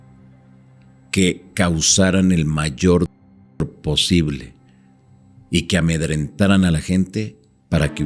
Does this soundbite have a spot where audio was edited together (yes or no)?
no